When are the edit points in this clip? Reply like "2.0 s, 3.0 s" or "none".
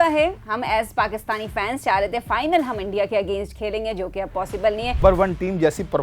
5.0 s